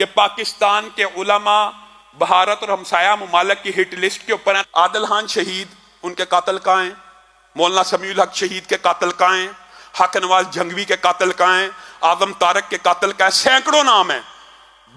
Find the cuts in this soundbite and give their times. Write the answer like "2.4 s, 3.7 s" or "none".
4.6 s